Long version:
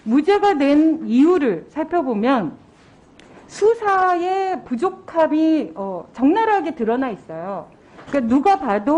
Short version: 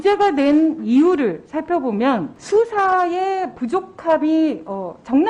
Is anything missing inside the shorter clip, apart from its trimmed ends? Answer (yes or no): yes